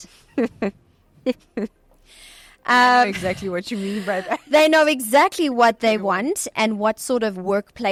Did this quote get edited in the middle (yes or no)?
no